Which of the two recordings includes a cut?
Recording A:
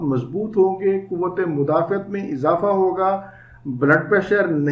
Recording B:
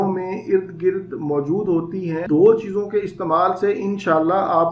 B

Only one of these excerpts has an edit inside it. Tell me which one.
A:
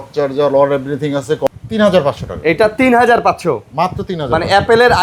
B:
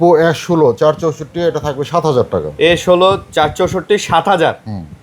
A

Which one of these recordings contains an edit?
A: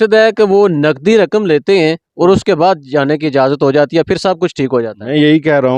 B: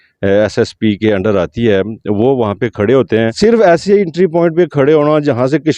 B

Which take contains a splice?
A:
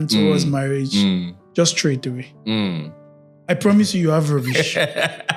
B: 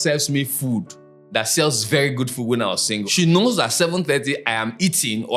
B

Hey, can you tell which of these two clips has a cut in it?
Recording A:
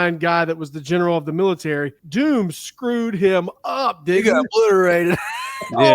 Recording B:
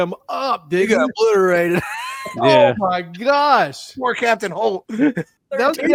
A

